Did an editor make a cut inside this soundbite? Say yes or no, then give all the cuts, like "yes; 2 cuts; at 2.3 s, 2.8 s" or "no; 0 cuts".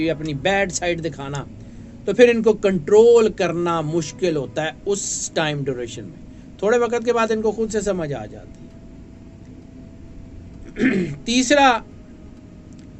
no; 0 cuts